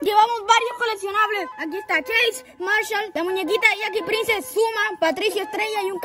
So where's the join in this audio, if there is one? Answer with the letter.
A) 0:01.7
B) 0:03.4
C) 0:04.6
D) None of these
D